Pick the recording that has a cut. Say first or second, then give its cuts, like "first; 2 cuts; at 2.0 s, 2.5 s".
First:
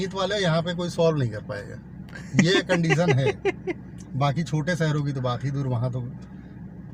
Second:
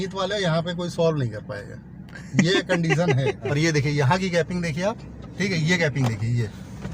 second; 1 cut; at 3.4 s